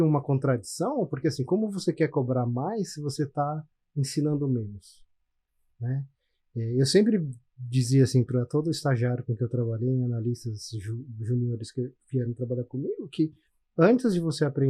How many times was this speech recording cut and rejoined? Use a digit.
0